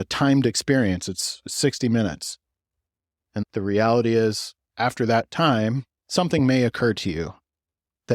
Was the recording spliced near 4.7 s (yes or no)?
no